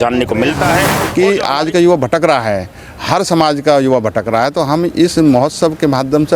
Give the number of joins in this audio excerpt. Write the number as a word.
one